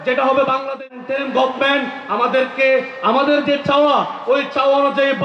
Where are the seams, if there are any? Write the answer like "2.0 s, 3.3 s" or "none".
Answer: 1.0 s